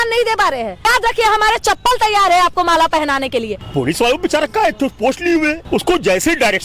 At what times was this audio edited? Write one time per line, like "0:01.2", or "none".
0:00.8
0:03.6
0:05.6